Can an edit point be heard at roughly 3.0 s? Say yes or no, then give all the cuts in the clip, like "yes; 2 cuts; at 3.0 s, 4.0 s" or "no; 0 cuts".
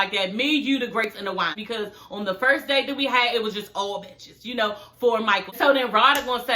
no; 2 cuts; at 1.5 s, 5.5 s